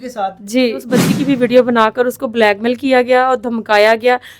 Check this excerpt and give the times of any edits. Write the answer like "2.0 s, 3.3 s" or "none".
0.9 s